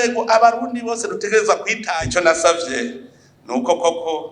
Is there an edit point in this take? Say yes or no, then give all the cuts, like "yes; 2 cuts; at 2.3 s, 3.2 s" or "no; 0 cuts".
yes; 1 cut; at 1.8 s